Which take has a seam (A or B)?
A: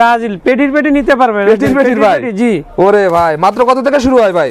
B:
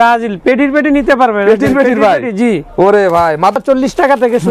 B